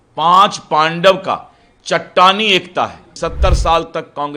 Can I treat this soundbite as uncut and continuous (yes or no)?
no